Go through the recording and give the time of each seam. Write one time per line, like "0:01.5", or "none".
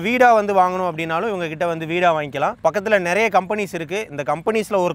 none